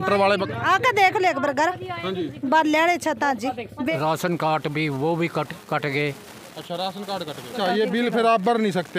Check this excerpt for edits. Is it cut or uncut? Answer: cut